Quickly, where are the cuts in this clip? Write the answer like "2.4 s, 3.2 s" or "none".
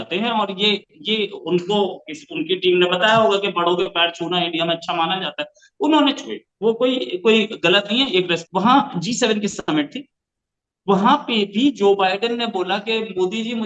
8.4 s